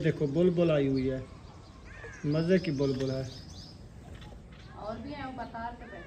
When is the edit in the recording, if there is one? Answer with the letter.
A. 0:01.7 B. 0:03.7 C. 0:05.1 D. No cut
D